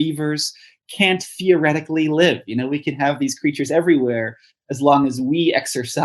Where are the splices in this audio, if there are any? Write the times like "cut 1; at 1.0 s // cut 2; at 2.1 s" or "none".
none